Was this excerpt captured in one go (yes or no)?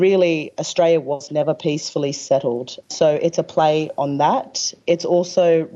no